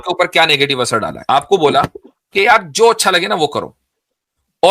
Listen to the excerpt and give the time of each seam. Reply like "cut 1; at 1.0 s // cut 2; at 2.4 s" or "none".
cut 1; at 1.1 s